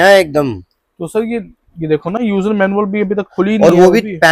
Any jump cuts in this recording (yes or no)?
no